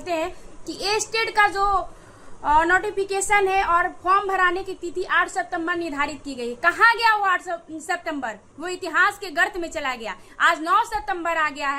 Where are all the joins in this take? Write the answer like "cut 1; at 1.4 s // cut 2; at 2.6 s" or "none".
none